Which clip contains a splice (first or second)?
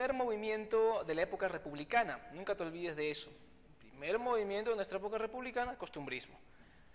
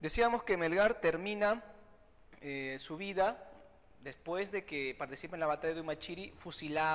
first